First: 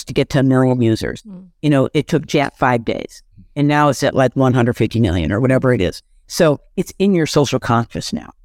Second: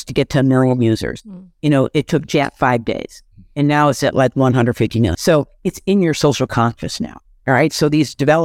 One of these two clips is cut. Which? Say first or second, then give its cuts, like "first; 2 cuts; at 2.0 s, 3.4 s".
second; 1 cut; at 5.2 s